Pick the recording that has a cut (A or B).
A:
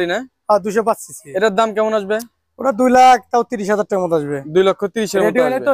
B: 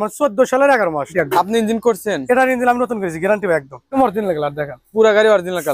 B